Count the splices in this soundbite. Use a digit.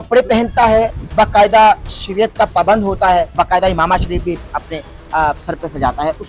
2